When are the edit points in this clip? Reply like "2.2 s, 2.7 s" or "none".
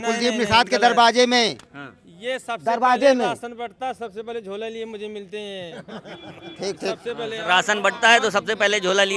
none